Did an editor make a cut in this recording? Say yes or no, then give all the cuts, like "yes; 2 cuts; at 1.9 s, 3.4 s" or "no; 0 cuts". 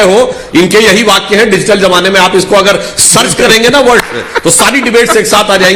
no; 0 cuts